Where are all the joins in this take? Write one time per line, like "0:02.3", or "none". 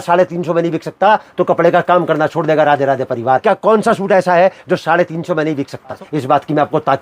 0:03.4
0:06.0